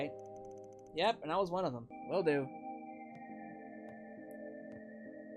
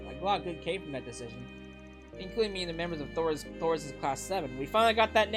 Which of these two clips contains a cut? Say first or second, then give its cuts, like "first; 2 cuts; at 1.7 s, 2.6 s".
first; 1 cut; at 1.9 s